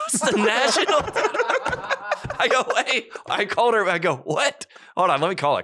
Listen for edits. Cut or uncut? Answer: uncut